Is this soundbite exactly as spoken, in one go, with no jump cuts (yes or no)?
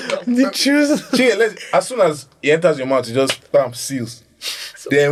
yes